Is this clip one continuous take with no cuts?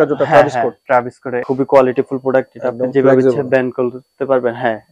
no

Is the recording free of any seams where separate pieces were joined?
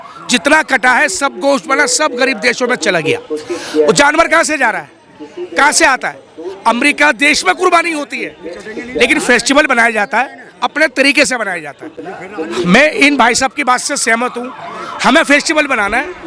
yes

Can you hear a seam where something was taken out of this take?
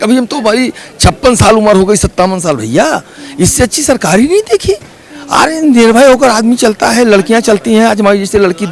no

